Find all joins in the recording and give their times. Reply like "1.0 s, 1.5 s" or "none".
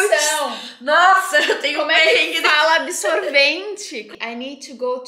4.1 s